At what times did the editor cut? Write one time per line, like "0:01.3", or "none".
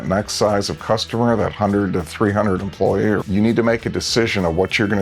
0:03.2